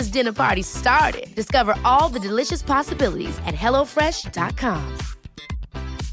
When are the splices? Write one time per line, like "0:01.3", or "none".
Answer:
none